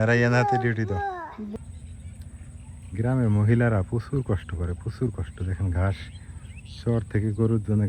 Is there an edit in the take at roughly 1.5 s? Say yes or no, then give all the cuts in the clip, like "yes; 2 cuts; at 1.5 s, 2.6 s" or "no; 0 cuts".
yes; 1 cut; at 1.5 s